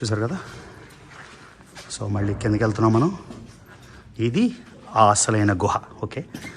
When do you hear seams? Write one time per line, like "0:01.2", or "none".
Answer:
0:01.5